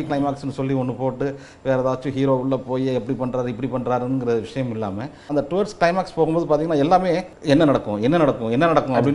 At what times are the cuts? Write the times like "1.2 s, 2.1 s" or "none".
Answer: 5.3 s, 7.3 s